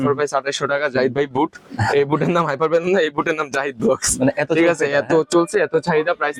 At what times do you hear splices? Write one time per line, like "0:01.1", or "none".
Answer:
none